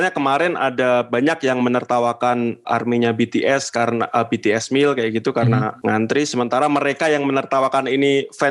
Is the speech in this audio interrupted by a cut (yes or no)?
no